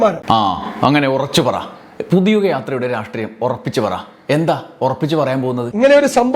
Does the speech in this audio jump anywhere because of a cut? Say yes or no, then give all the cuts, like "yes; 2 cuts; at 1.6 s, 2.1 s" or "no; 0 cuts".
no; 0 cuts